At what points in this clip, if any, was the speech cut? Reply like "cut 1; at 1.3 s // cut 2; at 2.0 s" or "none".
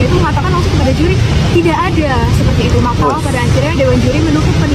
none